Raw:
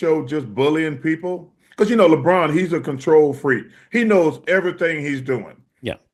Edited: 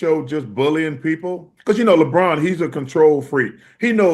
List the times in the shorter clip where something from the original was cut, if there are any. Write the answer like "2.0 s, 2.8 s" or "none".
1.5 s